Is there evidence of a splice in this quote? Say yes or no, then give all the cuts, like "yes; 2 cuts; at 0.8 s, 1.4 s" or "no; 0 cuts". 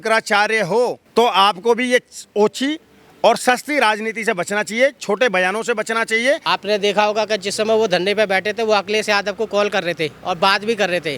yes; 2 cuts; at 1.0 s, 6.4 s